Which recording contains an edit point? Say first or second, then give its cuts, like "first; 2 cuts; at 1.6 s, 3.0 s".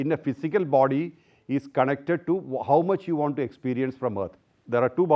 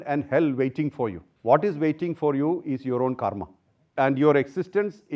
second; 2 cuts; at 1.3 s, 3.8 s